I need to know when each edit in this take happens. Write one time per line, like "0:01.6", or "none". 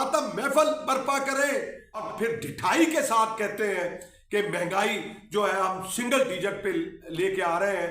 0:02.1